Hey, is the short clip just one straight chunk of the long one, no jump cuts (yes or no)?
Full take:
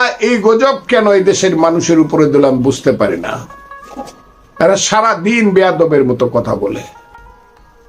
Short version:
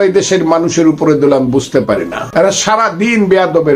no